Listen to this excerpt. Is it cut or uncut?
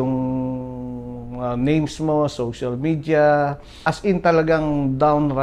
cut